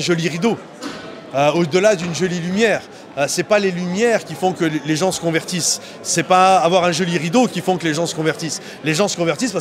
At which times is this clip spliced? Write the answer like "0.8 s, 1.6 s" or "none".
none